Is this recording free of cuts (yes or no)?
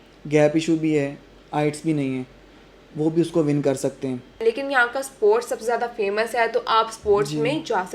no